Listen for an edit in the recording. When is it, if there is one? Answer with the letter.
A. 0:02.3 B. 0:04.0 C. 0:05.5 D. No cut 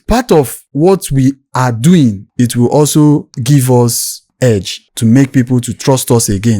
A